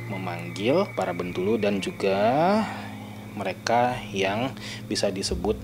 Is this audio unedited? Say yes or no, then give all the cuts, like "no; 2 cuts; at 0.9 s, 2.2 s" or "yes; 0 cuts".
no; 1 cut; at 0.9 s